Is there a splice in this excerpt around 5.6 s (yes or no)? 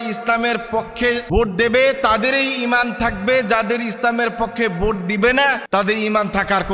yes